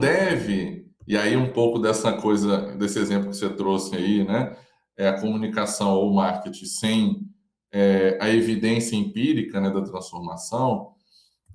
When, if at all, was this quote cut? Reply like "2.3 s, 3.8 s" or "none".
none

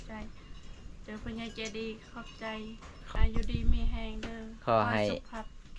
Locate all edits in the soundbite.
3.1 s

